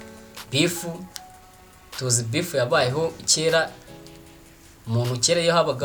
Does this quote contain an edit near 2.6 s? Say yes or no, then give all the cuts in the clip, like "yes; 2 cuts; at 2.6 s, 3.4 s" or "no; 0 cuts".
no; 0 cuts